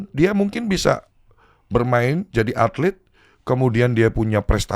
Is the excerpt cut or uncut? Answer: uncut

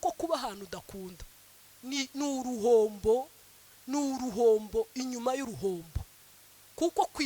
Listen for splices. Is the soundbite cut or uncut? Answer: uncut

